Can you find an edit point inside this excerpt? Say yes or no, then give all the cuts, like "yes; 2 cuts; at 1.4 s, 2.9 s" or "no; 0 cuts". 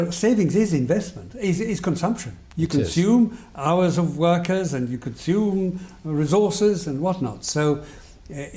yes; 1 cut; at 3.3 s